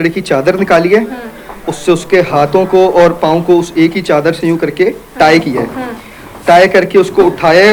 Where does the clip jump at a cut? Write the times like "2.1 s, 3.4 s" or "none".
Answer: none